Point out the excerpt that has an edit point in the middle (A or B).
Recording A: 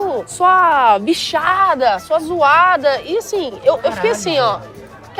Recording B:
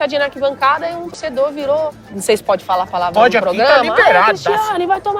B